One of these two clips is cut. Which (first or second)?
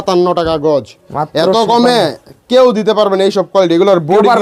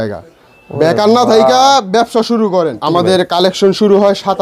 second